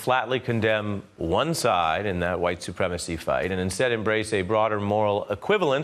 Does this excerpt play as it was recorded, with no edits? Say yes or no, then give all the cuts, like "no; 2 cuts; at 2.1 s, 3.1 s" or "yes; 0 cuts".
yes; 0 cuts